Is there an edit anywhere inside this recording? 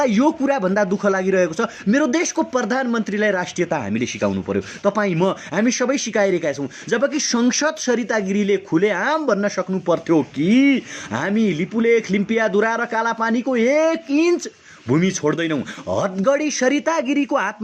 no; 0 cuts

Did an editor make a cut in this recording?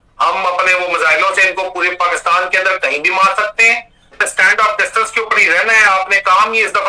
yes; 1 cut; at 4.2 s

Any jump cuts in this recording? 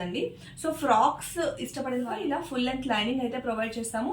yes; 1 cut; at 2.1 s

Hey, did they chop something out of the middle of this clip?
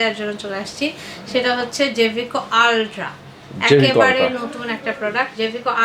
no; 0 cuts

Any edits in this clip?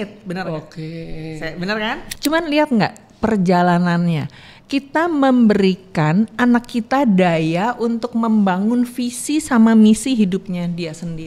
yes; 1 cut; at 2.1 s

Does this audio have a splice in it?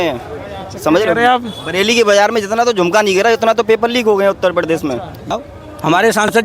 yes; 1 cut; at 5.2 s

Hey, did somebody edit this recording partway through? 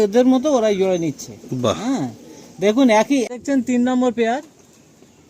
yes; 1 cut; at 3.3 s

